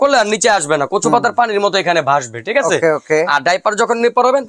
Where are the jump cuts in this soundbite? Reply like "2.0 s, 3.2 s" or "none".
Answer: none